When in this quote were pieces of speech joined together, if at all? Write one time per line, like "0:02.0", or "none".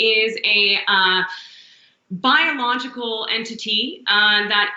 none